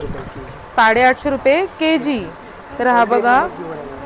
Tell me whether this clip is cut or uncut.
uncut